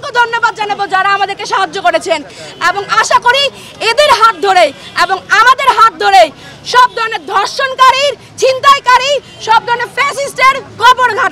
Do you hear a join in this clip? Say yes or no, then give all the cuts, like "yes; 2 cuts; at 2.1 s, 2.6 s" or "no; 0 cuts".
no; 0 cuts